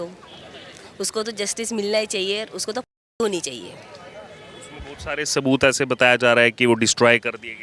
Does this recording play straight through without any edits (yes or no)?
yes